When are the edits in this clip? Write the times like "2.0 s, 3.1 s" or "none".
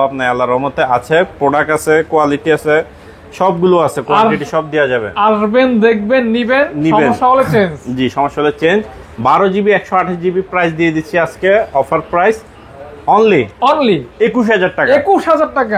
none